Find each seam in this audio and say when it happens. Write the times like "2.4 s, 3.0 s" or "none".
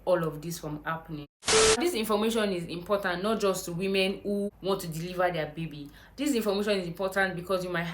1.8 s, 4.5 s